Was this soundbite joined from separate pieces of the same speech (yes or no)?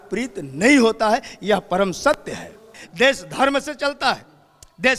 yes